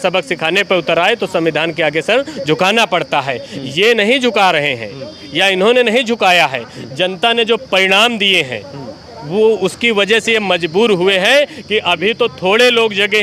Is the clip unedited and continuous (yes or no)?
yes